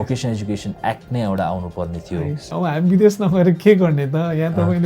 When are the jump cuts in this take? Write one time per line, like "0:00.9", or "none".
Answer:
0:02.5